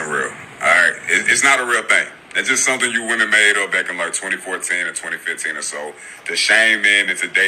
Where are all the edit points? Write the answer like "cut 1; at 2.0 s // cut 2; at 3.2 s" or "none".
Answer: cut 1; at 2.2 s